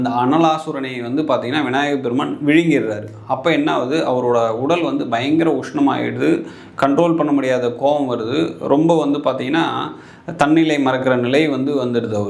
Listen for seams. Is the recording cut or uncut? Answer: uncut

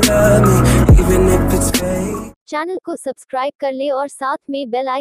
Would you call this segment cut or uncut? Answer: cut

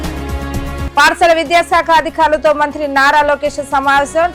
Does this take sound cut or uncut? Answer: uncut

